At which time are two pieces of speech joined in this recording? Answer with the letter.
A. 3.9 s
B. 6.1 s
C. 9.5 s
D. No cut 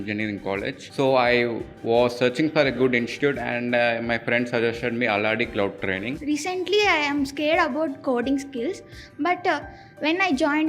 B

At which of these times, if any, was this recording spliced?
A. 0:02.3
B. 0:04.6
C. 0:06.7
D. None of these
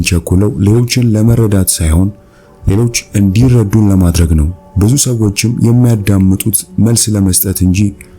B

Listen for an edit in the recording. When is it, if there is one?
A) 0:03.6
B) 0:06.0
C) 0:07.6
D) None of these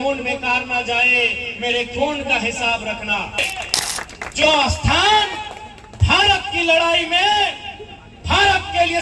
A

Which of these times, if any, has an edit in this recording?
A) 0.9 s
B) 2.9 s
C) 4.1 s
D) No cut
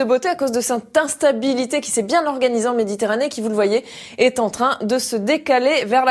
B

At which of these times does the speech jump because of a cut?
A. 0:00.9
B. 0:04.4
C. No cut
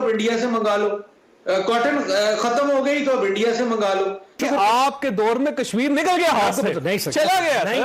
B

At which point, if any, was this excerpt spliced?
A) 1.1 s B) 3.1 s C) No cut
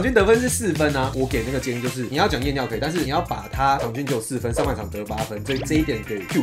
A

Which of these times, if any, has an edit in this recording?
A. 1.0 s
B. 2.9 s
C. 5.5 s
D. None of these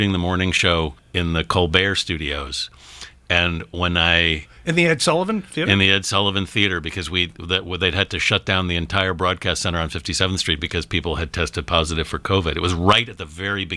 A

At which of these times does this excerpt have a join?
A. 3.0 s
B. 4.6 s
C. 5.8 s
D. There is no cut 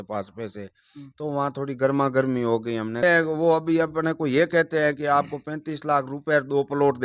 A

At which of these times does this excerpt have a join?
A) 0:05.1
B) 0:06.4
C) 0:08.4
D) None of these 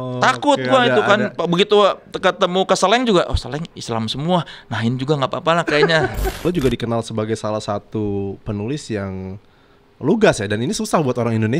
B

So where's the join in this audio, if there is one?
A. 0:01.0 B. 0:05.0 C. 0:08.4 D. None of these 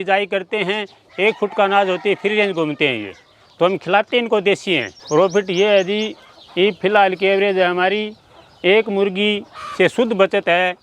B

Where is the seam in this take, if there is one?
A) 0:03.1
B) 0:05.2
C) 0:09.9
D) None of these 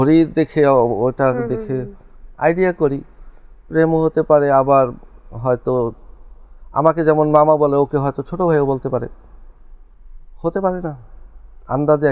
D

